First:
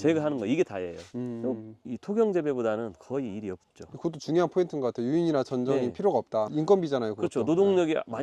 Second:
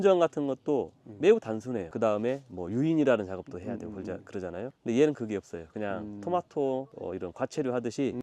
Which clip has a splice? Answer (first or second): second